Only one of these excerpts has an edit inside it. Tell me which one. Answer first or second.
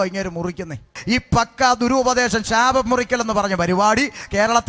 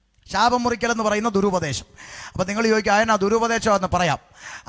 first